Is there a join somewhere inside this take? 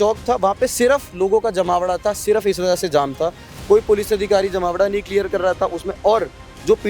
no; 0 cuts

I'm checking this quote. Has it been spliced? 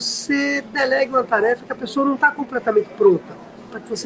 no; 0 cuts

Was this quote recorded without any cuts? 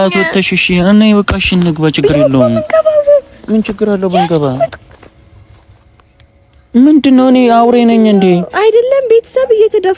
yes; 0 cuts

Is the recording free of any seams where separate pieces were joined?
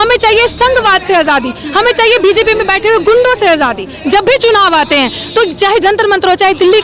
no; 1 cut; at 4.0 s

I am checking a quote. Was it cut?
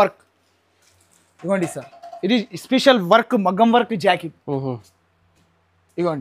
no; 0 cuts

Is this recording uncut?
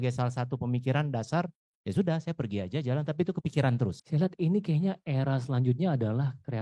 no; 1 cut; at 4.0 s

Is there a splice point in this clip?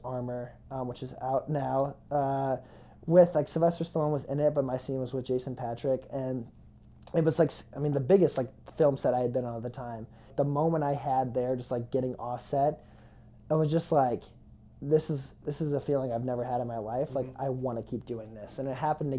yes; 1 cut; at 10.3 s

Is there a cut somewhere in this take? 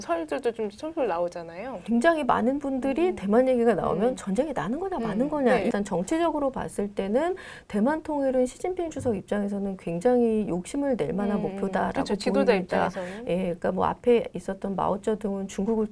yes; 2 cuts; at 1.8 s, 5.7 s

